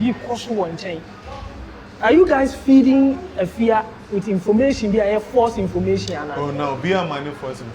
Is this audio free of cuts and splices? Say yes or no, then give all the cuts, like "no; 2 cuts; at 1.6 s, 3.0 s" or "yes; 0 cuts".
yes; 0 cuts